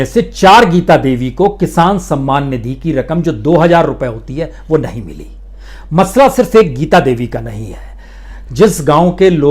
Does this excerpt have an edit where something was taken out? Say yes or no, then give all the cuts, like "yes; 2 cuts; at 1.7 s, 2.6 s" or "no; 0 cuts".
yes; 1 cut; at 8.4 s